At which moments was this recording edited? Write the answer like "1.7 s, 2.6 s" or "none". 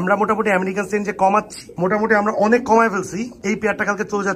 none